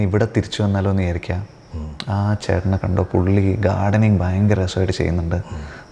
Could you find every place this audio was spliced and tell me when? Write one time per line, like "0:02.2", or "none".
none